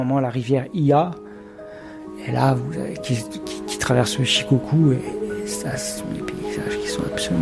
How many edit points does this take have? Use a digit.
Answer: 0